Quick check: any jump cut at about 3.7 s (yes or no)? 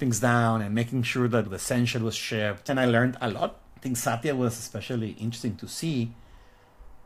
yes